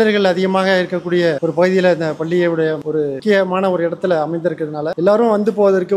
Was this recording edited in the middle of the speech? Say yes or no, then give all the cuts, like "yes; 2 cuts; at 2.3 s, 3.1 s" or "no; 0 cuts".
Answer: no; 0 cuts